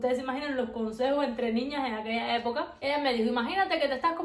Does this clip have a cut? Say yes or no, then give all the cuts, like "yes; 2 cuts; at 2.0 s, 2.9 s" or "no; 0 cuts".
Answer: no; 0 cuts